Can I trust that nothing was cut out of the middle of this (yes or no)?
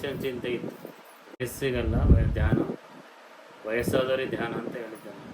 no